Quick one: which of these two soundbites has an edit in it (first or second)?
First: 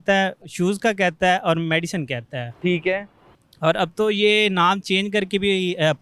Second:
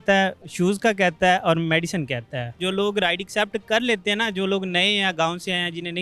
second